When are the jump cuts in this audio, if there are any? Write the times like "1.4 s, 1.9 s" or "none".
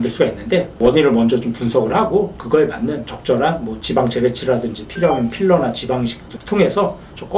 none